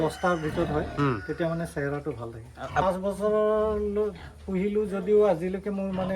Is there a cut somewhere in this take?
yes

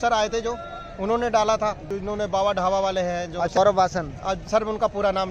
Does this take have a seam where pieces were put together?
yes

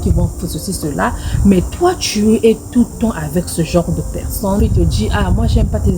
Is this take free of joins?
no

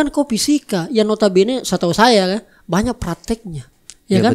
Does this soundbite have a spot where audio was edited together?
no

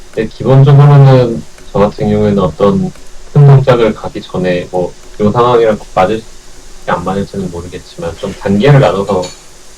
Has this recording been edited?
no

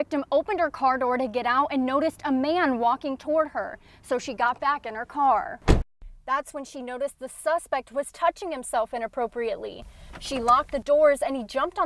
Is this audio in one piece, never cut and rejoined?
yes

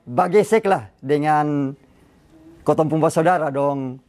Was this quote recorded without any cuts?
yes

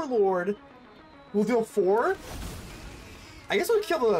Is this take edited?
no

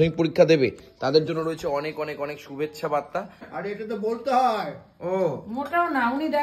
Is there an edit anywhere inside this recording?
yes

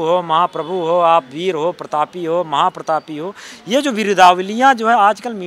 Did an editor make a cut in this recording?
no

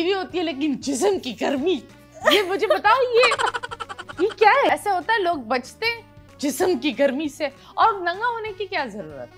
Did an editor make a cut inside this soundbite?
yes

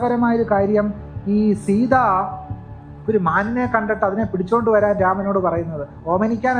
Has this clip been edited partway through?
no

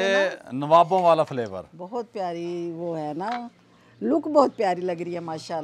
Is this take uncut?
yes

